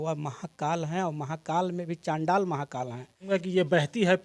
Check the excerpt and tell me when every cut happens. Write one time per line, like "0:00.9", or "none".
0:03.3